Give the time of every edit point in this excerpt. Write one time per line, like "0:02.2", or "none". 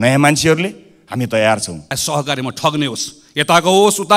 0:02.0